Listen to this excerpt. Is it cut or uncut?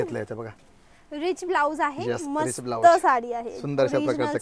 uncut